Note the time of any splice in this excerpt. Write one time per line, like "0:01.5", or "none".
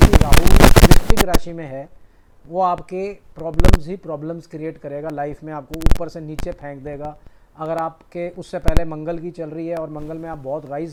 none